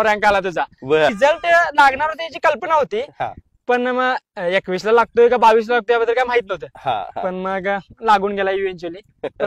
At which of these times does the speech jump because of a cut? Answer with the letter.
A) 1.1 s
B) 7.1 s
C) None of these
A